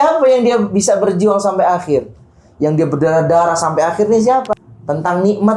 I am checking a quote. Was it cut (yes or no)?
yes